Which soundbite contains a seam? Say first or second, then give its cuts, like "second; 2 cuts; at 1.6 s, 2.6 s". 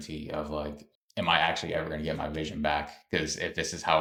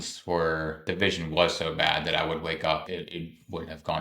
second; 2 cuts; at 0.9 s, 2.9 s